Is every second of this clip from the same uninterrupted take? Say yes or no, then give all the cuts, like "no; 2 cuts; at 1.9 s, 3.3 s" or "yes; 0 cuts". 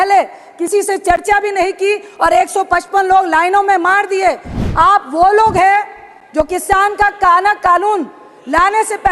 no; 1 cut; at 4.5 s